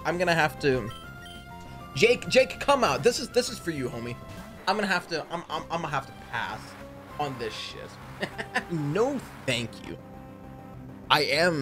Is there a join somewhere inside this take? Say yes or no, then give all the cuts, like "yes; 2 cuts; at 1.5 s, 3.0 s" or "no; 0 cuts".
no; 0 cuts